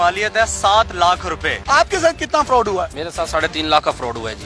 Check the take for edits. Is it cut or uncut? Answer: cut